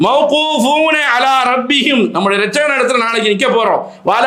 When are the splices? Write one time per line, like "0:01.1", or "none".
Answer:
none